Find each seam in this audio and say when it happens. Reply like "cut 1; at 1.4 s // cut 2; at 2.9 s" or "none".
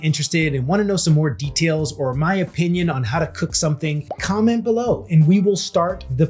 none